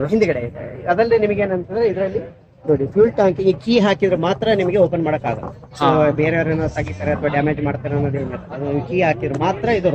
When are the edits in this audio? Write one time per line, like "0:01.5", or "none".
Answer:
none